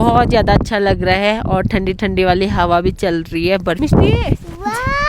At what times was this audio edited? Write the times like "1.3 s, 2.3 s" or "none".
3.8 s